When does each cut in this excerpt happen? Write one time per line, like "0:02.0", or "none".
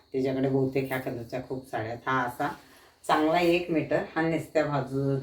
none